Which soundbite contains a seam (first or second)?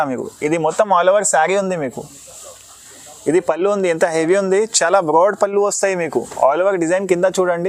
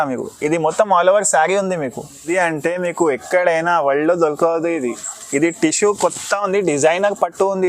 second